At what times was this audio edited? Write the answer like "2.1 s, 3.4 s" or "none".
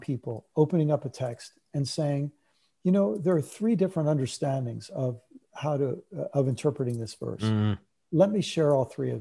none